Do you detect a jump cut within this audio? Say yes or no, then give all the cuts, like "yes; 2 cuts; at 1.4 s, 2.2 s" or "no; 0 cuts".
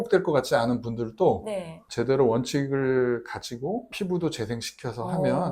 yes; 1 cut; at 3.9 s